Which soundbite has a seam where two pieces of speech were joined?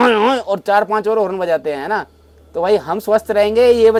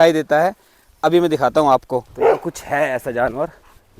second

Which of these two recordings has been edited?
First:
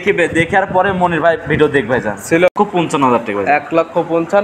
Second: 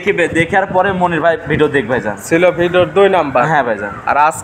first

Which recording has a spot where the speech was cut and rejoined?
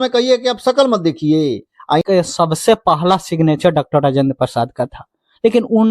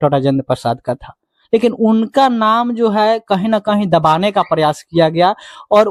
first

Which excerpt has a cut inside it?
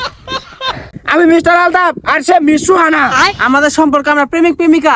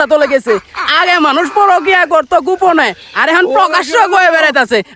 first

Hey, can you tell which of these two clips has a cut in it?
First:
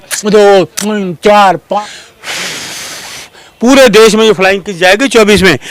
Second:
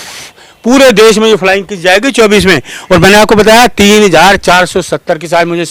first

